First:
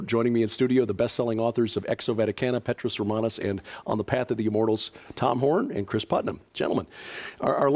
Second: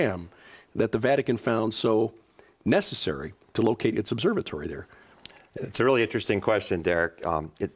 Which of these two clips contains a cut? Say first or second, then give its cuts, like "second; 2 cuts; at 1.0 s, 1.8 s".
first; 1 cut; at 1.3 s